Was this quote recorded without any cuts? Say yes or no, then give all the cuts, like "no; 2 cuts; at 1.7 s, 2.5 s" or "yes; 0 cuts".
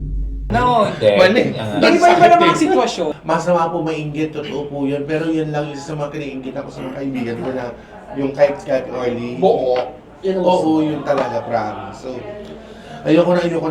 no; 1 cut; at 3.1 s